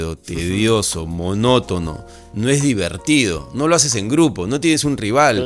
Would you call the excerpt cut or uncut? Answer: uncut